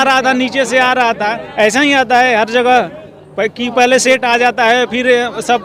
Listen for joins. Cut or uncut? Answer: uncut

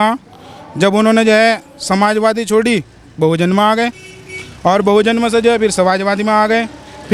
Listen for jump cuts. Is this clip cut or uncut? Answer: uncut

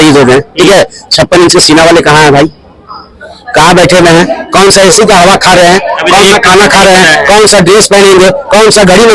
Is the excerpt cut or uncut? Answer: uncut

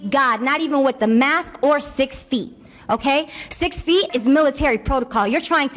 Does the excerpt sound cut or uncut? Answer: cut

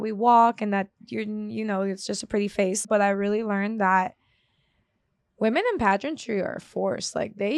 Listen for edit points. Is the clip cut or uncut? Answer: cut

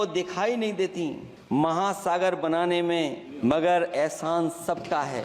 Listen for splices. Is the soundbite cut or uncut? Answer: cut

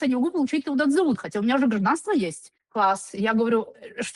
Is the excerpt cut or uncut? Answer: uncut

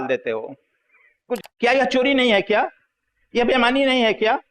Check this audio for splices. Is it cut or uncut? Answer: cut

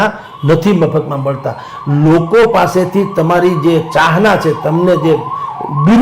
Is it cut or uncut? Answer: uncut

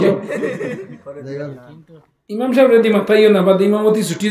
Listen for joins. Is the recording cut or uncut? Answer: cut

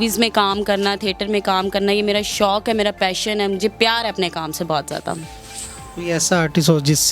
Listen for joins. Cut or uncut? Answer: uncut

